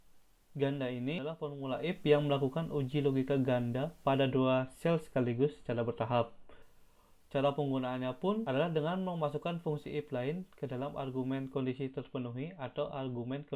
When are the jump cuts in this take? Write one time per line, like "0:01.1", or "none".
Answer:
0:01.4
0:08.4